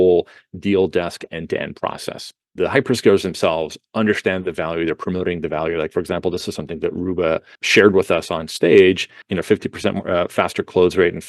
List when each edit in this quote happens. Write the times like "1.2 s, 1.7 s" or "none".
2.5 s, 7.6 s, 9.3 s